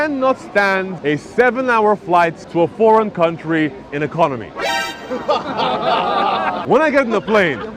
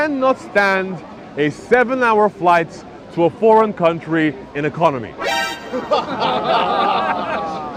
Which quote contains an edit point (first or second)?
first